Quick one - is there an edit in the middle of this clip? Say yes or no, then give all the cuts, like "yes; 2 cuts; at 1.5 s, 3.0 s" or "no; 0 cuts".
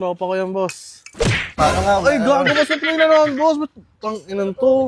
no; 0 cuts